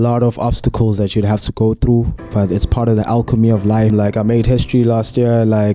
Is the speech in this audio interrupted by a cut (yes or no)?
yes